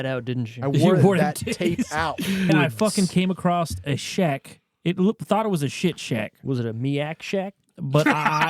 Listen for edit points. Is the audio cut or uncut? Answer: cut